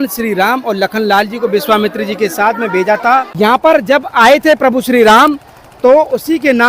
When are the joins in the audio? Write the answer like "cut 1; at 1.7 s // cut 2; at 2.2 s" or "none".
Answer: cut 1; at 3.3 s

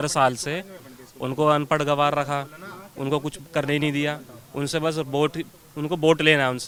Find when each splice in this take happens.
none

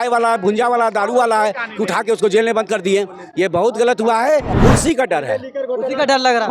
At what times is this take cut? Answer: cut 1; at 4.5 s

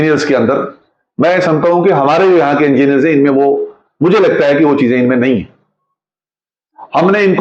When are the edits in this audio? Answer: none

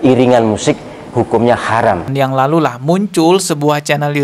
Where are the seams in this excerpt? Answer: cut 1; at 2.1 s

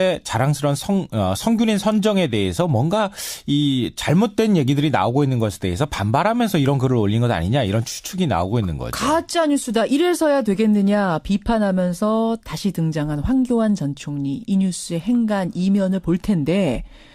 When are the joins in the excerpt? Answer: cut 1; at 6.8 s

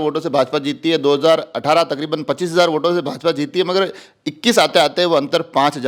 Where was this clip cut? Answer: none

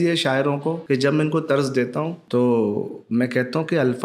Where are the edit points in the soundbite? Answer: cut 1; at 0.8 s // cut 2; at 2.2 s

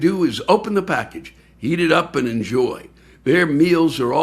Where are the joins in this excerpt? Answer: none

